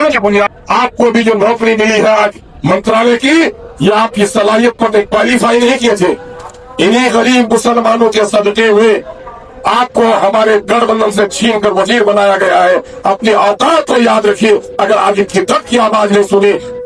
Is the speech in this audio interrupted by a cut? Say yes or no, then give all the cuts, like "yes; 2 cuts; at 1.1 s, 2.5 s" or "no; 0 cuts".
no; 0 cuts